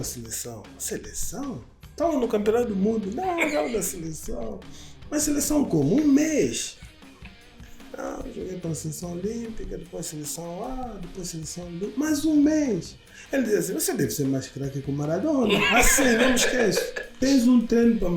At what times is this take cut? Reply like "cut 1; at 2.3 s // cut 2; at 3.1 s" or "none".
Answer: cut 1; at 17.2 s